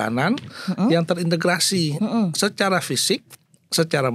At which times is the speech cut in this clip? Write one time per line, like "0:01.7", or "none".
none